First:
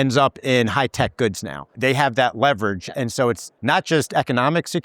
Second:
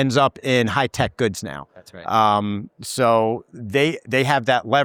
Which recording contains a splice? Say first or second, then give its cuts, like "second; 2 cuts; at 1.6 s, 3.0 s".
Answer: first; 2 cuts; at 1.7 s, 3.5 s